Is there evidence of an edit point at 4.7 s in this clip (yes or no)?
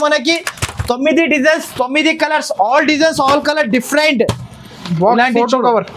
no